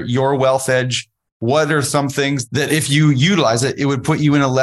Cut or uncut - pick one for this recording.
cut